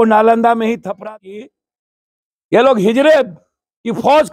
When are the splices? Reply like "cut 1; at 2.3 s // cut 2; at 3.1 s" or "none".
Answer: cut 1; at 1.1 s